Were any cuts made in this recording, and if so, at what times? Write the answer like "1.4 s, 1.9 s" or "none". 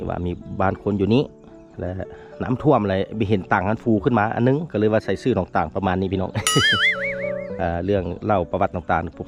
none